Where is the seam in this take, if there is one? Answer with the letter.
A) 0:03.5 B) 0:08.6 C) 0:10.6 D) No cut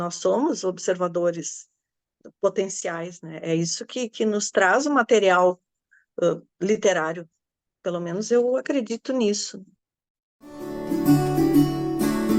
C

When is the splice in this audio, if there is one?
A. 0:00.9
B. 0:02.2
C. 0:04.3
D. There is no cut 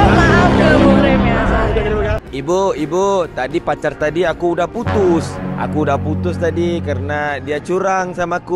B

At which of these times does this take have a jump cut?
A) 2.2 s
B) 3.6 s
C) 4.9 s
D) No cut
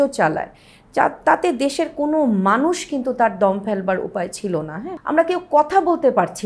C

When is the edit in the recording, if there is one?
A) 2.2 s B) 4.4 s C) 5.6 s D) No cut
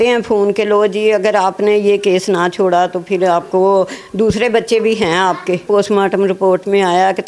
C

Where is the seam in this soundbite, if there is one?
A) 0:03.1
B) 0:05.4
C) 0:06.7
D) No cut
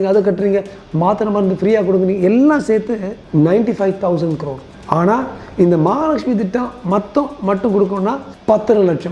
A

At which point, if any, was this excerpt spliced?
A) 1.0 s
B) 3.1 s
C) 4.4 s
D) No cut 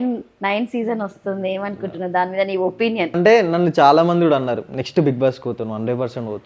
B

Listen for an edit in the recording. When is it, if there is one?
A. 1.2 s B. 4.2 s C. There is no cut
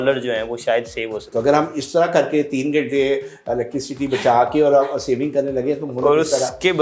A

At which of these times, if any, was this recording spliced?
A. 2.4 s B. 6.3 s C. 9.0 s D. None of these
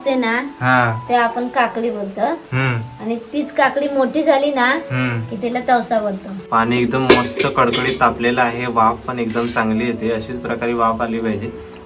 B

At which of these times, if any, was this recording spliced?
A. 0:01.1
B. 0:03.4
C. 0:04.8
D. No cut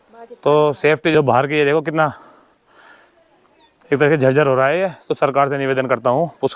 A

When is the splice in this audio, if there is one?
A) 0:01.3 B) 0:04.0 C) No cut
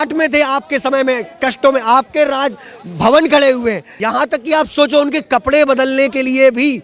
B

